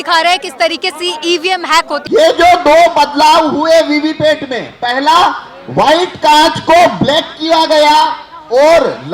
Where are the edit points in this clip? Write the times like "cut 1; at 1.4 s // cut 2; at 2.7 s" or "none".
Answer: cut 1; at 2.0 s